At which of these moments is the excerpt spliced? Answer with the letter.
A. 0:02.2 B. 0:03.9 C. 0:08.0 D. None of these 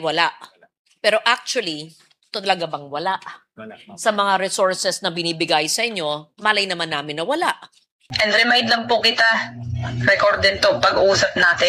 C